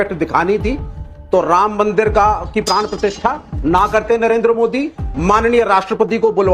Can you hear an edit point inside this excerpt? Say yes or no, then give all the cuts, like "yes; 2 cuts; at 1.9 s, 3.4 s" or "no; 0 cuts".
no; 0 cuts